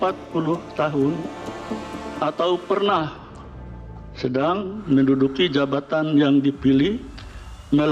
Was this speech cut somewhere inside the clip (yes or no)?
no